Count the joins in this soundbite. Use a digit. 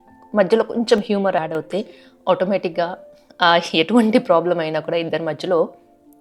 1